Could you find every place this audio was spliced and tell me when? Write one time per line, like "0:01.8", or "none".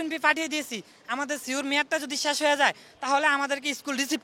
none